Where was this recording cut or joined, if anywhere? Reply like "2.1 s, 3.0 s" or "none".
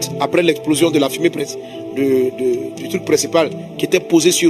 none